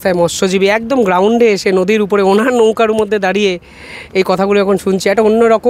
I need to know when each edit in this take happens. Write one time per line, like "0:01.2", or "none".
none